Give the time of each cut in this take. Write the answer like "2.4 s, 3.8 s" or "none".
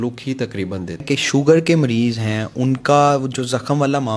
1.1 s